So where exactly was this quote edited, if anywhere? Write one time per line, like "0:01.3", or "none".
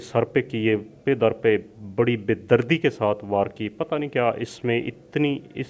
none